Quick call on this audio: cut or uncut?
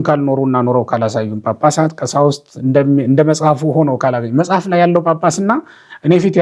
uncut